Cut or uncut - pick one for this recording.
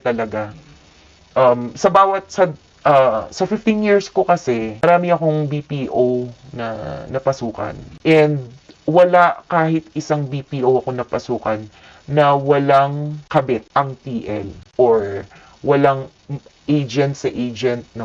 uncut